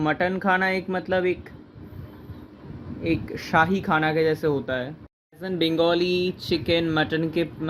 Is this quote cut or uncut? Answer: uncut